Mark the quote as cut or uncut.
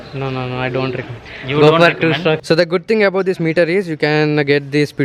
cut